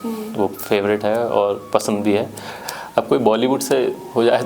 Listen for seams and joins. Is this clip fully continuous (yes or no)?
no